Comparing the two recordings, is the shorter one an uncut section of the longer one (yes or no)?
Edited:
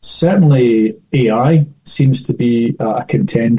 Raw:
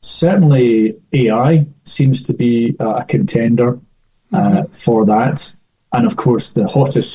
yes